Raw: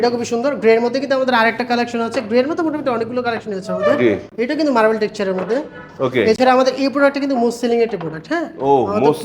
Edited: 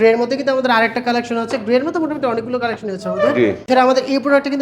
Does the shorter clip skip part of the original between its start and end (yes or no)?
yes